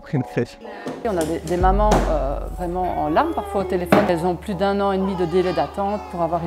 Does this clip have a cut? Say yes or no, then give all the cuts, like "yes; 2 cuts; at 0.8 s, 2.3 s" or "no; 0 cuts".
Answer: yes; 2 cuts; at 1.0 s, 4.1 s